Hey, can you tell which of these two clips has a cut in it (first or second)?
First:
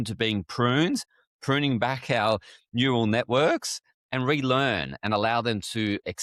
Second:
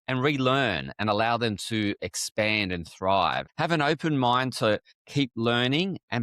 second